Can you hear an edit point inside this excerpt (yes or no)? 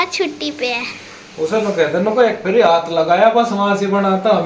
no